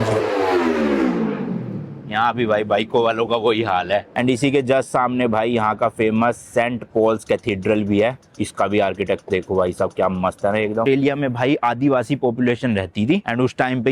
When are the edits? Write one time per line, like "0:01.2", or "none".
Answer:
0:04.2
0:10.8